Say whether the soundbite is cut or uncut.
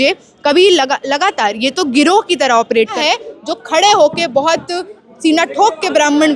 cut